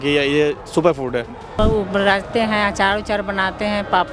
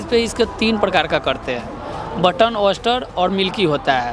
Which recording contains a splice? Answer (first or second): first